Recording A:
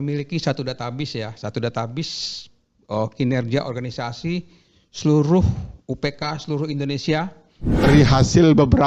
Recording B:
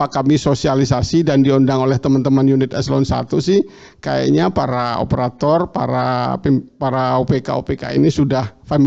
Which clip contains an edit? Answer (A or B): A